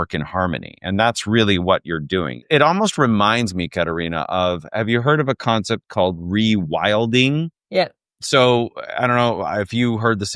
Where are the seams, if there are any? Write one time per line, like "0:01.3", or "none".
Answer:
0:02.5